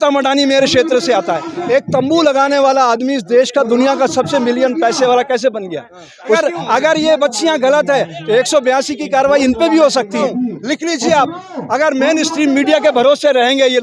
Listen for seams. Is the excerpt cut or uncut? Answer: cut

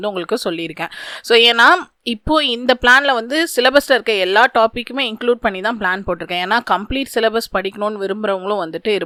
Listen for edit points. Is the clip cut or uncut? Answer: uncut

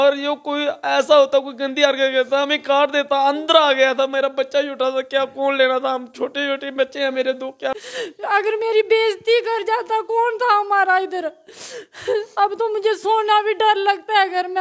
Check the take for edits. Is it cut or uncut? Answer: cut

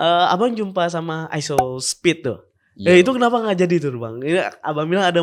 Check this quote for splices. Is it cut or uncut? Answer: uncut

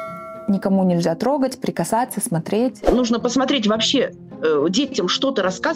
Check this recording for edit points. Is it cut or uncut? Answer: cut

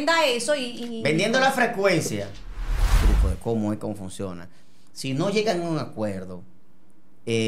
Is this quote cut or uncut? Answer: cut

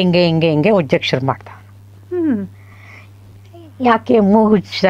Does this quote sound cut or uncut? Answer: uncut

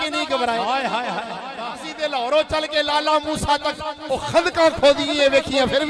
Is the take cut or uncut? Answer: uncut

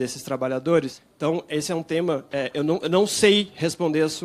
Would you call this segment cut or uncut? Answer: cut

